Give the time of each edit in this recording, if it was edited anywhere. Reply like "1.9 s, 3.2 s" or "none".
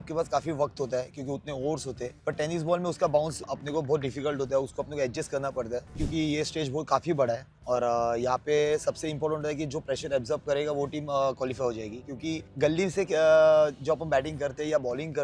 2.2 s, 3.4 s, 6.0 s, 12.5 s